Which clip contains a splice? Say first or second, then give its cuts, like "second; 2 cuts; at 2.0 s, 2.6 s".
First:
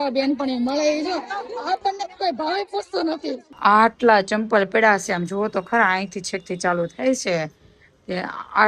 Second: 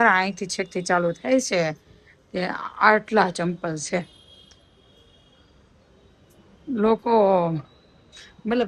first; 1 cut; at 3.5 s